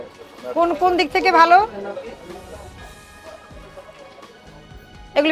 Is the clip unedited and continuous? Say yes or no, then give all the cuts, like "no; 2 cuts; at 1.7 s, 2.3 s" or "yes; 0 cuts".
yes; 0 cuts